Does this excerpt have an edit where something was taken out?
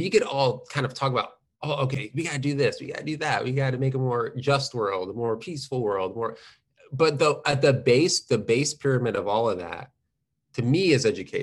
no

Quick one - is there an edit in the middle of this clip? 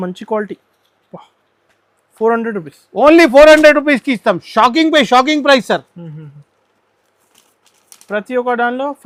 no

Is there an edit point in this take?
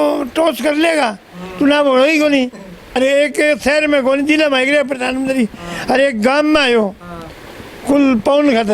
yes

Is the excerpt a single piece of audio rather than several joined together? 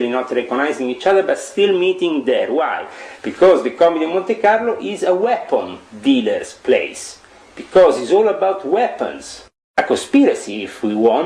no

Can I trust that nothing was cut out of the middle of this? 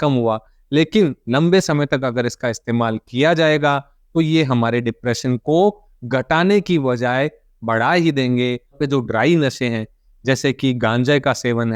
no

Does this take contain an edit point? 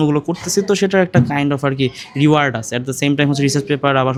no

